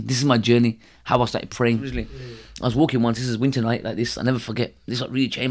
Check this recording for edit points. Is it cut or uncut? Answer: cut